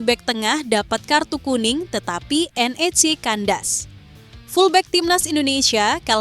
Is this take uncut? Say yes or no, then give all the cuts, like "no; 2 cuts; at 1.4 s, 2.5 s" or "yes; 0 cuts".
yes; 0 cuts